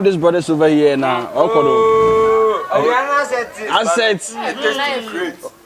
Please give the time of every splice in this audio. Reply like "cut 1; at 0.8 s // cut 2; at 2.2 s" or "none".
none